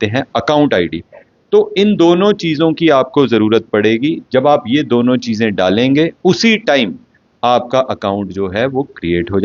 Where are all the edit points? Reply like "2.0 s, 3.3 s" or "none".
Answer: none